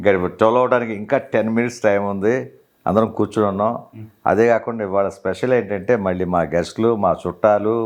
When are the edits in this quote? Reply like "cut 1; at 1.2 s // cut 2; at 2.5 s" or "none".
none